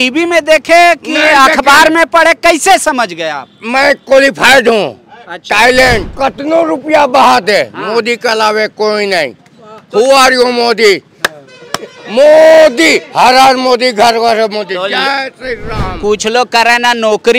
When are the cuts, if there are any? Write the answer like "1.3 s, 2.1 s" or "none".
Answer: 6.1 s